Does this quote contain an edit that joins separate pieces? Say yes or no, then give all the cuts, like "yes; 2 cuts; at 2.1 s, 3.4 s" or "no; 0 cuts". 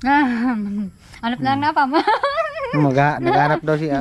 no; 0 cuts